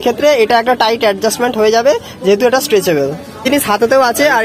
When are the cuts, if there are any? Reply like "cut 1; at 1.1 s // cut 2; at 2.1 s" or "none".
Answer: cut 1; at 3.4 s